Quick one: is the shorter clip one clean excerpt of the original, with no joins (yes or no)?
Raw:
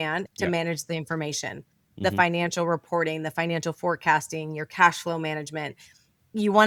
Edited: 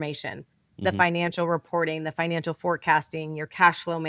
yes